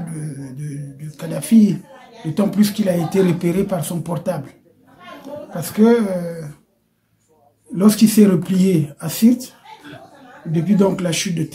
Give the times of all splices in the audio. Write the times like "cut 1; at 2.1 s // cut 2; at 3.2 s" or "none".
none